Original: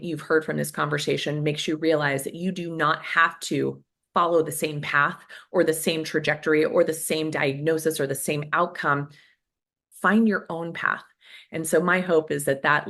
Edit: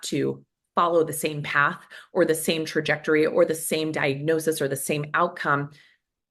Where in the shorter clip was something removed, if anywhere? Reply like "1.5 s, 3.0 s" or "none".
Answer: none